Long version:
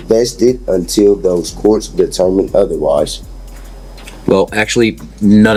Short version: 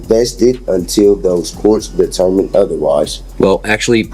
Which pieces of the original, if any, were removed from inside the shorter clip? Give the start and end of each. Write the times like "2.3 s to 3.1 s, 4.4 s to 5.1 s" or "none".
3.2 s to 4.1 s